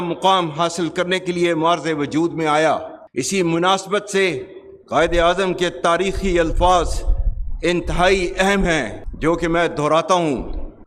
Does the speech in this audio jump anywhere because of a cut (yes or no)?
no